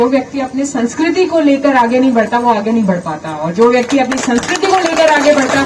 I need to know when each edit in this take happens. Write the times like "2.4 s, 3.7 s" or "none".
none